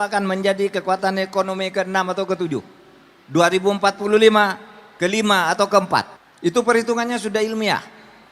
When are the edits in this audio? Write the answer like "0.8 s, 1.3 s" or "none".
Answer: 6.2 s